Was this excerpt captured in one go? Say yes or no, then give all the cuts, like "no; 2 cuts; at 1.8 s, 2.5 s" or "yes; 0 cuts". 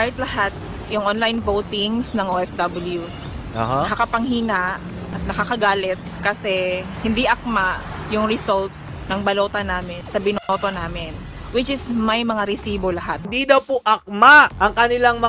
no; 1 cut; at 13.2 s